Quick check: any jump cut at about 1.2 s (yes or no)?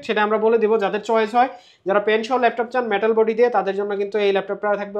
no